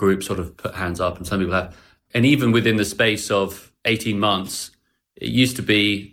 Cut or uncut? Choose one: cut